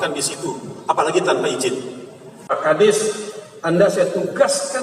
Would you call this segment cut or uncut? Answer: cut